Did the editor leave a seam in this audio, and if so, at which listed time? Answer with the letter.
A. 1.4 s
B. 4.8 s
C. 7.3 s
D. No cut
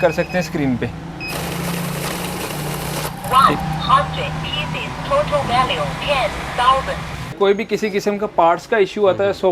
C